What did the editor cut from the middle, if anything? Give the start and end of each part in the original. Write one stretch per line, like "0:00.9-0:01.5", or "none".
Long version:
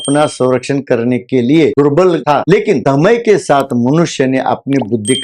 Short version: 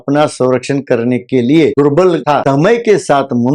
0:02.4-0:02.8